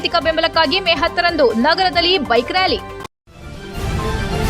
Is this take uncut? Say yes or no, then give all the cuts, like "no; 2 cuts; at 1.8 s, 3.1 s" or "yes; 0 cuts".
no; 1 cut; at 2.9 s